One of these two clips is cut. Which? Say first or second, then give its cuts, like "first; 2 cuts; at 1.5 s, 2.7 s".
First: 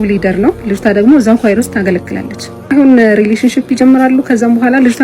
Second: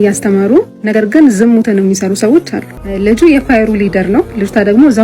second; 1 cut; at 2.7 s